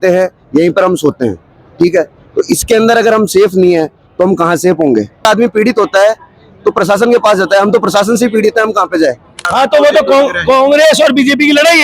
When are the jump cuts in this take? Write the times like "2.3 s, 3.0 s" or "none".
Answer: 5.2 s, 9.4 s